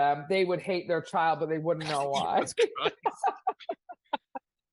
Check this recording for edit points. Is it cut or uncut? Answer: uncut